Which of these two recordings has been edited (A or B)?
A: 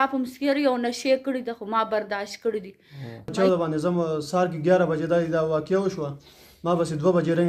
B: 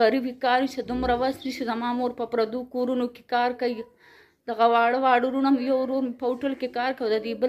A